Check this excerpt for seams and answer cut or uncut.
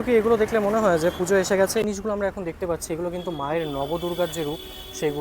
cut